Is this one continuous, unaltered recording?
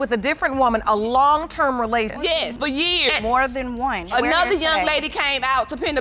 yes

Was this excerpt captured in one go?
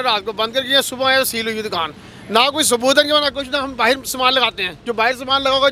yes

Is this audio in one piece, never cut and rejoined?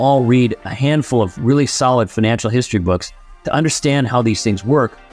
yes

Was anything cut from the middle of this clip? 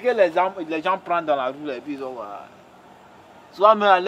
no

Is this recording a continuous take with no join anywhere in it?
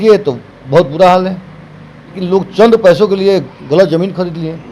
no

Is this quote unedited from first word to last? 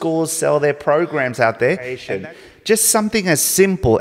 no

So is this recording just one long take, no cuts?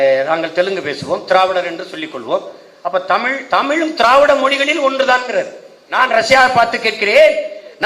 no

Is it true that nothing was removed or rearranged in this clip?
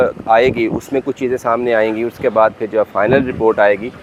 yes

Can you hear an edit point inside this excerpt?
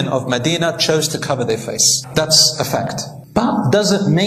no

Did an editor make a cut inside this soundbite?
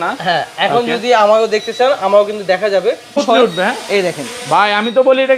yes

